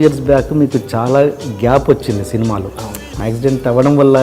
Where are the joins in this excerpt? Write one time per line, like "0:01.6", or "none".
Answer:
0:03.1